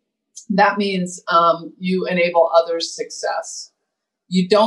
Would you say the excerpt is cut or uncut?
uncut